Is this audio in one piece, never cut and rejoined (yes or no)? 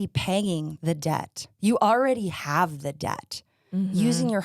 no